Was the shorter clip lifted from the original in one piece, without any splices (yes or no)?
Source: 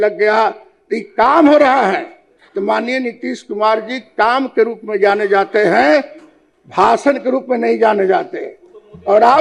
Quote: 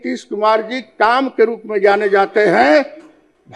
yes